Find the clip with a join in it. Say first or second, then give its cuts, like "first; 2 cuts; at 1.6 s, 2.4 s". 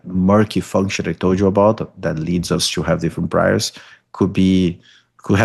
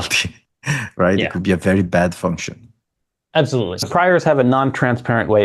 second; 1 cut; at 3.9 s